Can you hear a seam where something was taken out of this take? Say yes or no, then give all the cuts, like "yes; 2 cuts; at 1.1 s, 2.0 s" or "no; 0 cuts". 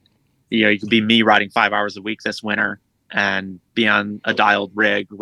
no; 0 cuts